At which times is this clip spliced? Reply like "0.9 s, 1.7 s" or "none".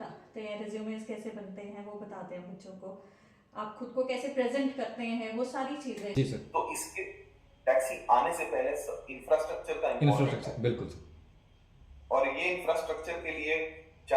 6.1 s